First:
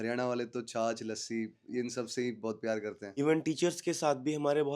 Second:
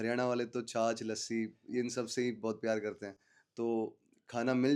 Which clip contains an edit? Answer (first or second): first